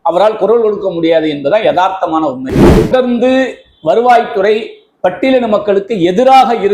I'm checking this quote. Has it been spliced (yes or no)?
yes